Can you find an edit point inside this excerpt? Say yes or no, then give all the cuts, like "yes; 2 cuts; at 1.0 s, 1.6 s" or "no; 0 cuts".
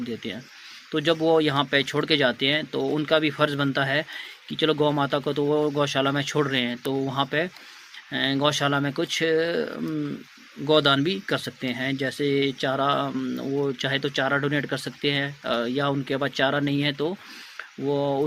no; 0 cuts